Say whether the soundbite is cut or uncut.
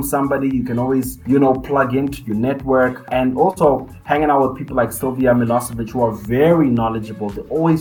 cut